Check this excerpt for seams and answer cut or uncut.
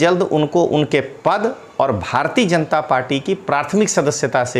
uncut